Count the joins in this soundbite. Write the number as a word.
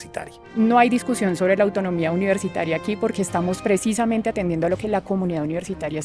zero